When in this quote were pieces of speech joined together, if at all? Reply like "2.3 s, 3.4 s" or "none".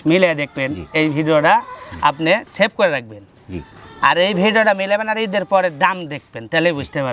none